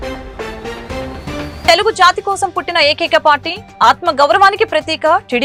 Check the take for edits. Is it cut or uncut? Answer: uncut